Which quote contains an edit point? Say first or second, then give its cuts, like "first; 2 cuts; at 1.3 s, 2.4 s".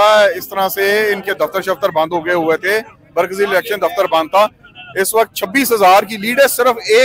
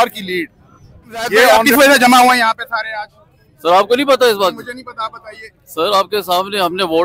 second; 1 cut; at 1.6 s